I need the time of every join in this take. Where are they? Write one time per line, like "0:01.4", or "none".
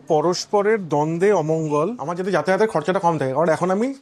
0:02.1